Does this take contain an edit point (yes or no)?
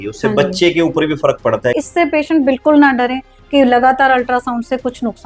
yes